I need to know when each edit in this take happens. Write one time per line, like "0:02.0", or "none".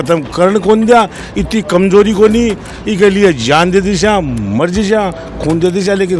none